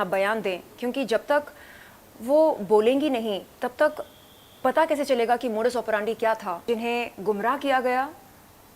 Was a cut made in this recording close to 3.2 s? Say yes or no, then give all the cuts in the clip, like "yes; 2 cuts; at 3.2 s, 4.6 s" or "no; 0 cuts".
no; 1 cut; at 6.6 s